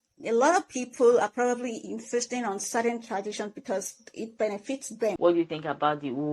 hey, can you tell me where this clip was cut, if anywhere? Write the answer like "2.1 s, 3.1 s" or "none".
5.2 s